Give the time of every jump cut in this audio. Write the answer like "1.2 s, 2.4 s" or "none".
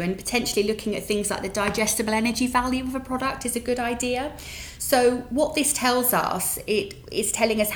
none